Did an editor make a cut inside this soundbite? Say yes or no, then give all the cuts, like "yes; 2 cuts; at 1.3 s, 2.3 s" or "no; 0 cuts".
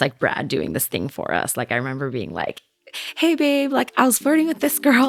no; 0 cuts